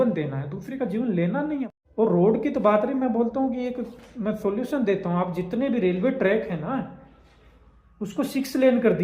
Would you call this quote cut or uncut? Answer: cut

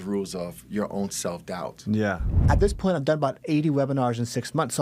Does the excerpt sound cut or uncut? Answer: cut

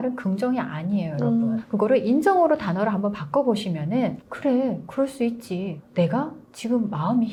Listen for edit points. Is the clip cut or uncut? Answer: uncut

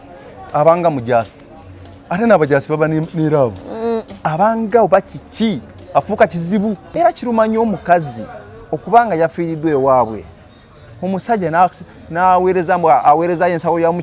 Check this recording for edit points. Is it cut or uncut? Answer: cut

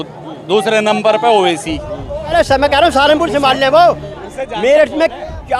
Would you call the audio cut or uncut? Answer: cut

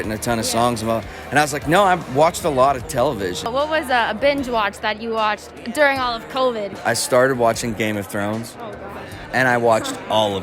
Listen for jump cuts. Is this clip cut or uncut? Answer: cut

